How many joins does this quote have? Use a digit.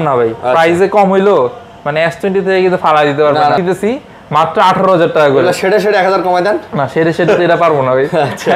1